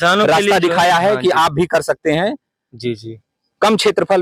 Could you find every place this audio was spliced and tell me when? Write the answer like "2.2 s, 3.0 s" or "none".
none

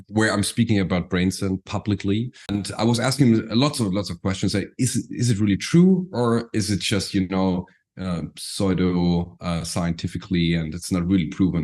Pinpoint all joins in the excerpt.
2.5 s

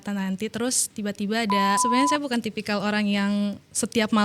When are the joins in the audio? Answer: 1.8 s

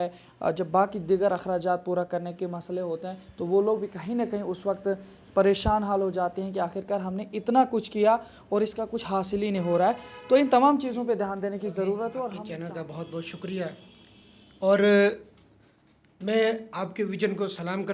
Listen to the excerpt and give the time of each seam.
12.5 s

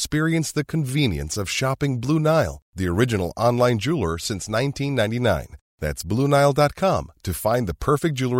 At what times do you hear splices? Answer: none

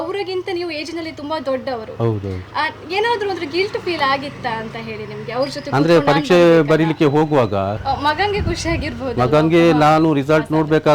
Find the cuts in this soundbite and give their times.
7.8 s

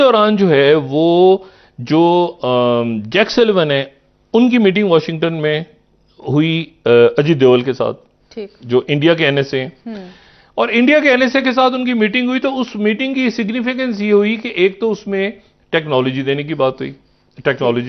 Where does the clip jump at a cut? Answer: none

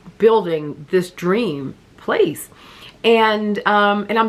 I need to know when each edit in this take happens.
none

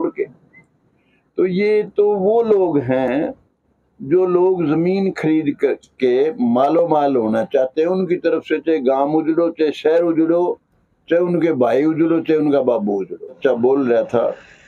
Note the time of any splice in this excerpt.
13.4 s

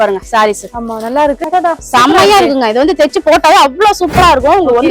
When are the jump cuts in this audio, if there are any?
1.4 s

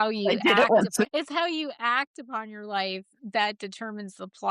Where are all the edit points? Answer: 1.1 s

